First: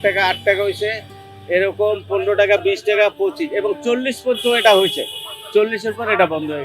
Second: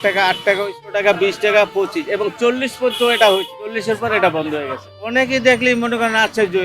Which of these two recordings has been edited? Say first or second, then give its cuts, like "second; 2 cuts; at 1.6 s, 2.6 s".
second; 3 cuts; at 0.9 s, 3.8 s, 5.0 s